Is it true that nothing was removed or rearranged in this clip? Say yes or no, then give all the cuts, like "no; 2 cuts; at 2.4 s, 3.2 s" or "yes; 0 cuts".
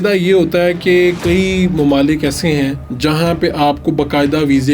no; 1 cut; at 2.8 s